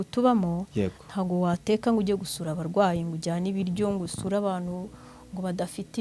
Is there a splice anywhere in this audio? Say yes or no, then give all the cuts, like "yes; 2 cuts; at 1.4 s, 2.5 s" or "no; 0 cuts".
no; 0 cuts